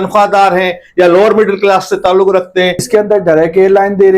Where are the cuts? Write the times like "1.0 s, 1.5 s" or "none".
2.9 s